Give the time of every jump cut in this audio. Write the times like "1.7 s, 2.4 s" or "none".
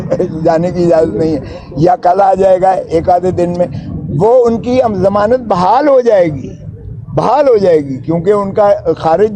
none